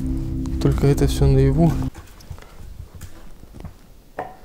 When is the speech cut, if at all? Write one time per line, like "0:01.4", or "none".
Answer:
0:01.9

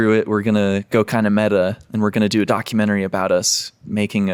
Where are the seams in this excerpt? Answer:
none

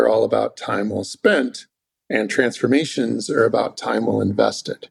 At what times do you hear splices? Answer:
none

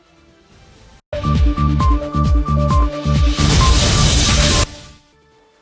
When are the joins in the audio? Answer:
0:04.7

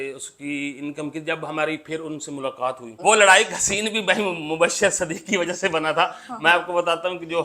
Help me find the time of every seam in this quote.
0:02.9

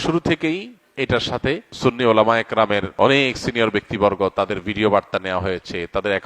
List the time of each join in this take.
0:01.7
0:02.9

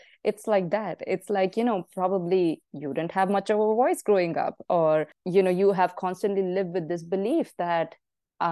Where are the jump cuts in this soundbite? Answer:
0:05.2

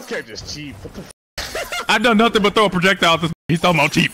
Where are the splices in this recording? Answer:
0:01.8

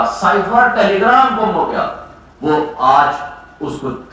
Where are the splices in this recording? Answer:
none

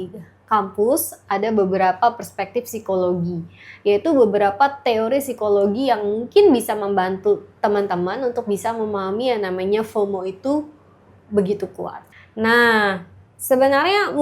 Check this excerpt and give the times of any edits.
0:12.1

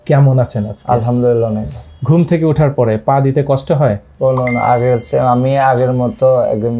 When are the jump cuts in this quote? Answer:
none

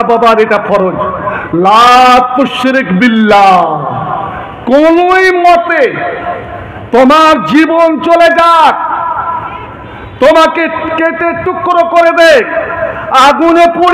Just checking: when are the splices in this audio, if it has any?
none

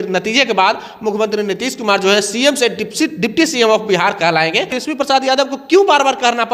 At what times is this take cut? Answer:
0:04.8

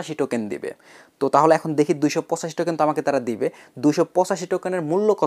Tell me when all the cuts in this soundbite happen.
none

